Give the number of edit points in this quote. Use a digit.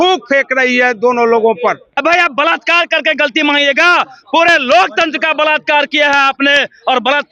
0